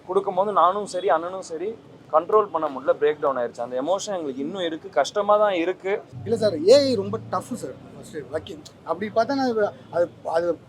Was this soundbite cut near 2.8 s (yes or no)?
no